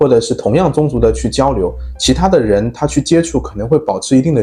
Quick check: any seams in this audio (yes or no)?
no